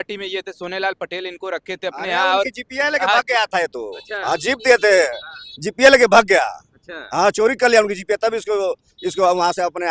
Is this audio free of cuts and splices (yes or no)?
yes